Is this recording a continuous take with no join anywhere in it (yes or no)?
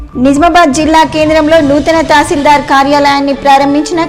yes